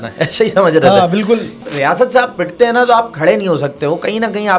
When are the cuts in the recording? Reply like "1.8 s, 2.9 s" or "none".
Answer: 1.6 s